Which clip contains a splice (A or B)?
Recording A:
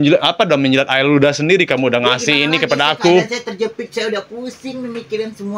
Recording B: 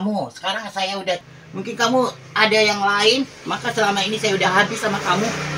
B